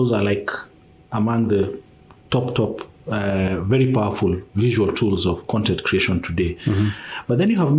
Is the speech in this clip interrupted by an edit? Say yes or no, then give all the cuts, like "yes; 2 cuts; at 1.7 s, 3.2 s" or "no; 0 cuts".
no; 0 cuts